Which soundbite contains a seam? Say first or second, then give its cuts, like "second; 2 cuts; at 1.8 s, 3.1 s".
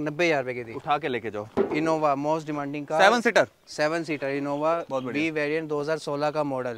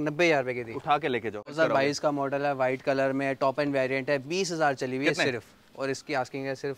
second; 1 cut; at 1.5 s